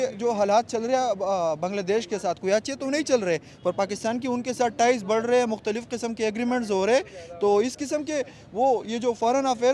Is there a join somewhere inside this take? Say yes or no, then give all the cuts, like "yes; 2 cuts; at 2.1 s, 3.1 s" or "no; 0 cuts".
no; 0 cuts